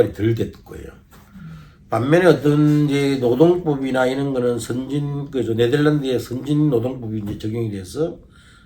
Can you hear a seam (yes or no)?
no